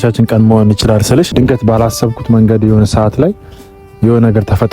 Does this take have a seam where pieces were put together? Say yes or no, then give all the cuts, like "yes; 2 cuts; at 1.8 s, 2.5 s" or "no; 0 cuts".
yes; 1 cut; at 1.3 s